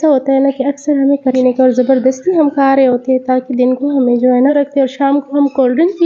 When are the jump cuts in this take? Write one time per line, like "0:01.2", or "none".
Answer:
0:01.3
0:04.5